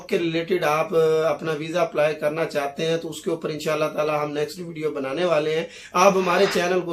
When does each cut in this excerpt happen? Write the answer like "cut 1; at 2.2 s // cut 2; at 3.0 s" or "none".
none